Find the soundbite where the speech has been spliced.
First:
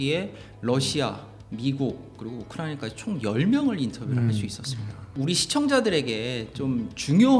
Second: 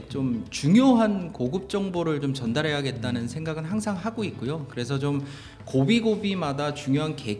first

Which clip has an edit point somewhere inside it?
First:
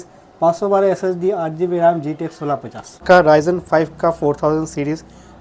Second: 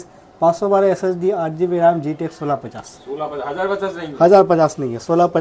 first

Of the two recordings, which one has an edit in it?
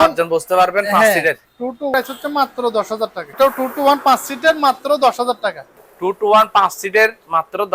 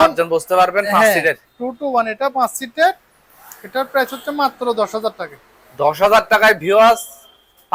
first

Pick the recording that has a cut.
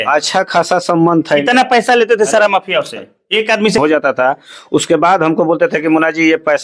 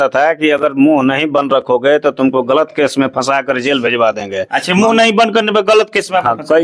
first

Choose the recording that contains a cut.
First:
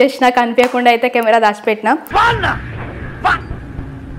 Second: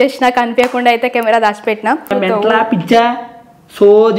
second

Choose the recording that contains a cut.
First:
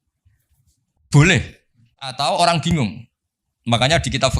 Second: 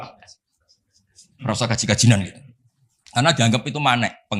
first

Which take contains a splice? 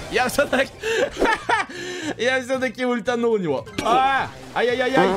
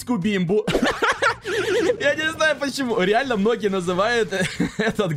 first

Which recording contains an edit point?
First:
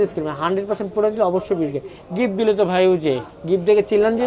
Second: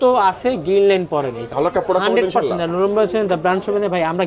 second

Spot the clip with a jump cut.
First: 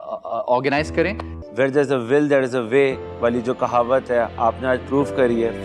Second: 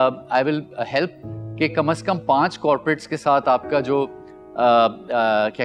first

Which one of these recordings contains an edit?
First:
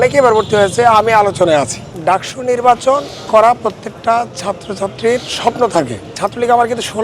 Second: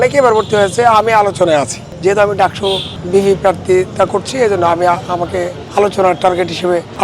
first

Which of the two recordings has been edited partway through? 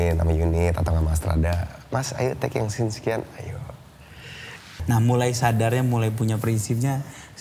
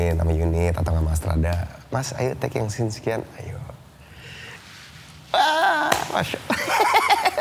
first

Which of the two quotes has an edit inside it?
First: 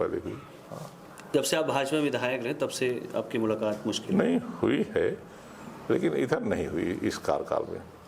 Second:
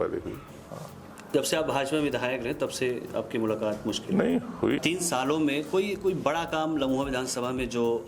second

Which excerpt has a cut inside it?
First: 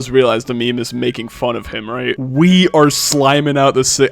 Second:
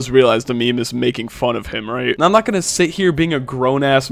first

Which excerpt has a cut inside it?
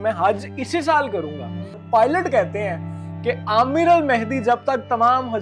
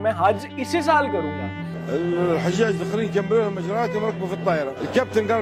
first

